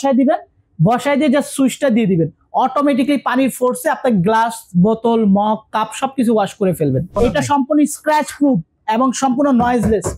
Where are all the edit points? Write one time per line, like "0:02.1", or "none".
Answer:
0:07.1